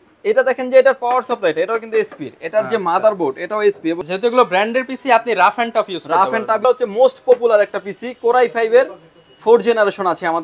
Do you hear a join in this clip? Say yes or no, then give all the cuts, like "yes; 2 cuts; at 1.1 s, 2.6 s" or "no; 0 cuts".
yes; 2 cuts; at 4.0 s, 6.6 s